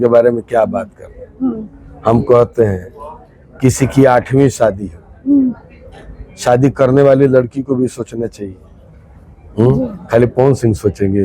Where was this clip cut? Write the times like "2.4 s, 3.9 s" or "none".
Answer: none